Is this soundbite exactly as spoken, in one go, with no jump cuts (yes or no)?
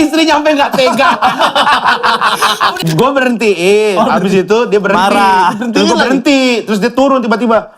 no